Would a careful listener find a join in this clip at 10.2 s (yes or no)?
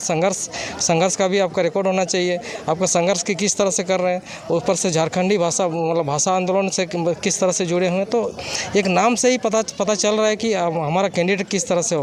no